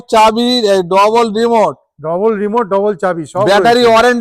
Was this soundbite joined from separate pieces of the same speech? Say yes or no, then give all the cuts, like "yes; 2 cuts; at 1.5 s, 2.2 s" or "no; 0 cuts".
no; 0 cuts